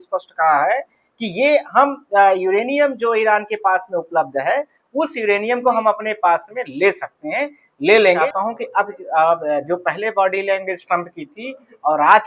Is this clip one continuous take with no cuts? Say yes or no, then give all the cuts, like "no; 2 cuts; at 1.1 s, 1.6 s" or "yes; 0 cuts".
no; 1 cut; at 8.2 s